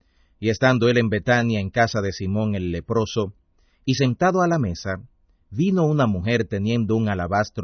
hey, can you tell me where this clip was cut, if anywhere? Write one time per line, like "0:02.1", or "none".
0:02.9

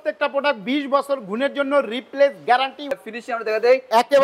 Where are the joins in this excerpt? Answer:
0:02.8

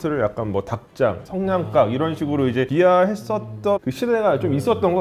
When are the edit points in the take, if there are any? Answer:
0:02.7
0:03.8

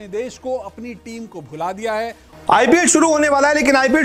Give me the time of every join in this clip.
0:02.3

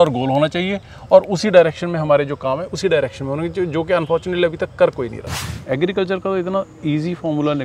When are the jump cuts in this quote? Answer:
0:05.4

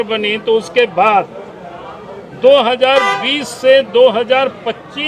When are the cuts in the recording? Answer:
none

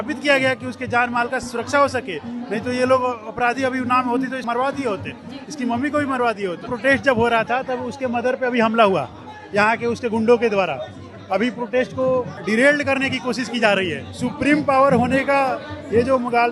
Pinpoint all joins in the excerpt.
0:04.4
0:06.7
0:12.3
0:14.1

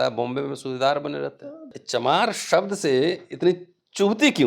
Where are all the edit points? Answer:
0:01.8

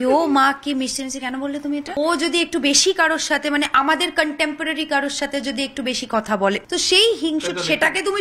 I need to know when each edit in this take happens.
0:02.0
0:06.6

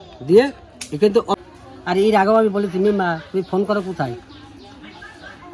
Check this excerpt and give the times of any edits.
0:01.4

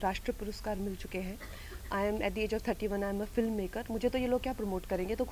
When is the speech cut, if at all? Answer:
none

